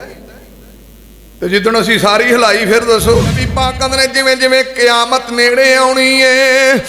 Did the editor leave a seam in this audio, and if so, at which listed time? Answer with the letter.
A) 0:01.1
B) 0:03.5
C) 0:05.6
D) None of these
B